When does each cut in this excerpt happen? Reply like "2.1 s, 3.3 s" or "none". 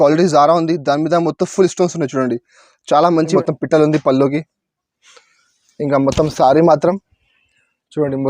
3.3 s